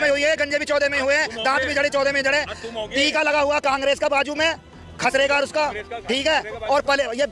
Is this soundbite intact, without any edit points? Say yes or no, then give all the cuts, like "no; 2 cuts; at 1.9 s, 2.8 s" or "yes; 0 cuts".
yes; 0 cuts